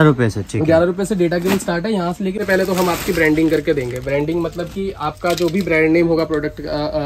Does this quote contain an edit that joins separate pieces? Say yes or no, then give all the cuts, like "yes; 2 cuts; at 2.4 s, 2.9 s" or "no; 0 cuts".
yes; 1 cut; at 2.4 s